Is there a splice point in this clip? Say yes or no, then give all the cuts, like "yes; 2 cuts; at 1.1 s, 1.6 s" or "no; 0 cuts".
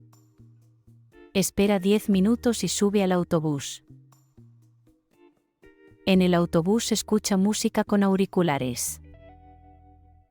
no; 0 cuts